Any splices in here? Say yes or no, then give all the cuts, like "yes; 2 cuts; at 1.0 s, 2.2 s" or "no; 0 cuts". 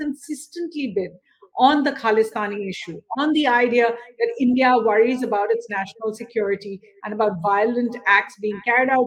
no; 0 cuts